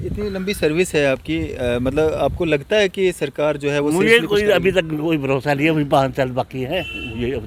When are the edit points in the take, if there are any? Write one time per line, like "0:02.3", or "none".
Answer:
none